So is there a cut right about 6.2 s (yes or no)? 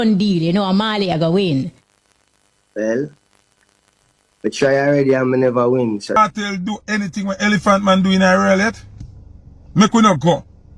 yes